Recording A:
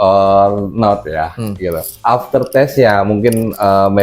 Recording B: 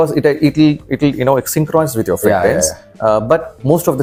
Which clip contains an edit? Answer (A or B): A